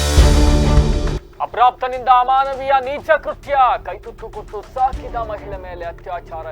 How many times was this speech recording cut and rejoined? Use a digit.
1